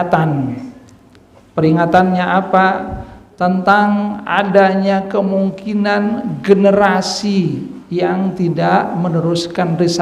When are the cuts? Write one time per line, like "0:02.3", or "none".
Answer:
none

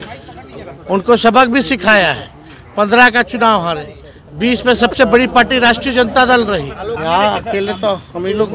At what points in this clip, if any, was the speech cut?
0:06.9

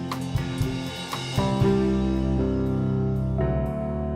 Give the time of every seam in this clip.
0:01.6

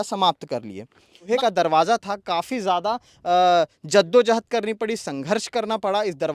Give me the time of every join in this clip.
0:01.2

